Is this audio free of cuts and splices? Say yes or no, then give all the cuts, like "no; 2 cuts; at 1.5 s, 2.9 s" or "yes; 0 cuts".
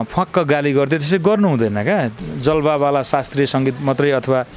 no; 1 cut; at 2.1 s